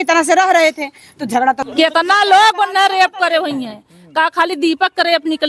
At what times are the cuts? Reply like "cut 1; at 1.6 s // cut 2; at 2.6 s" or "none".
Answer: cut 1; at 1.6 s